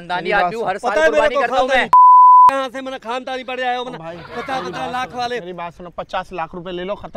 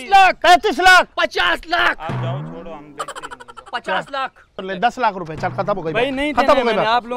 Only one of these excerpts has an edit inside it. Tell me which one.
second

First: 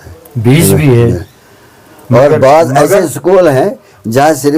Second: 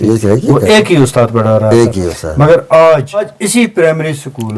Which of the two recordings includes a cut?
second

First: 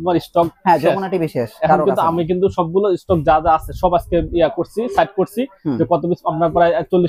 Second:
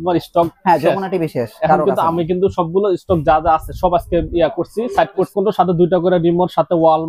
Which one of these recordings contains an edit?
second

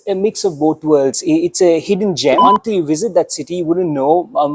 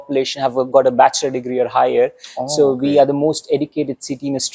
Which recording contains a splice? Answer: first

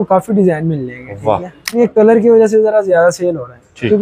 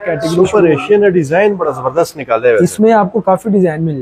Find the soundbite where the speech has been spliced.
first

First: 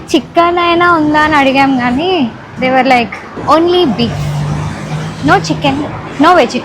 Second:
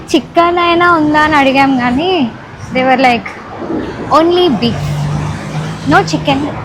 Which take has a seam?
first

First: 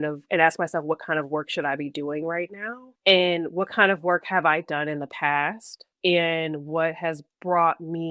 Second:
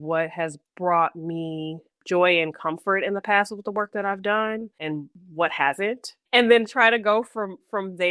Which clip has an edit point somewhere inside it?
second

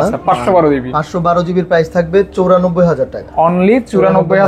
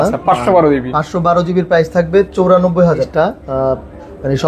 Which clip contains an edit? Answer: second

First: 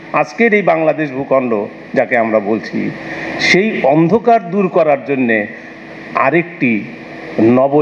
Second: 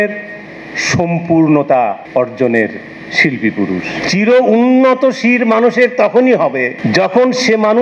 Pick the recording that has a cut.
second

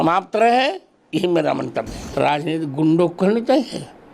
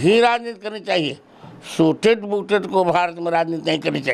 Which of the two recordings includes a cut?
first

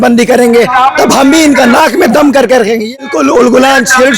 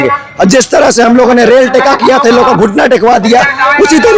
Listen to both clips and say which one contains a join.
first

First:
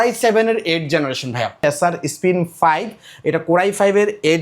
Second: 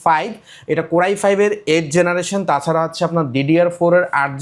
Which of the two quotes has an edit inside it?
first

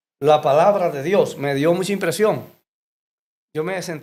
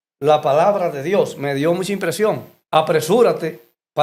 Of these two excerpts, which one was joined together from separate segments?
second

